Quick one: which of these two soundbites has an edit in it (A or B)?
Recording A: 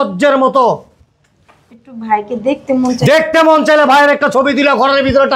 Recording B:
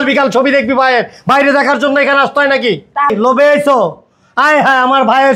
B